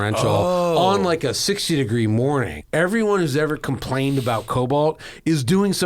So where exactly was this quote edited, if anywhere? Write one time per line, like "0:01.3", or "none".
0:02.6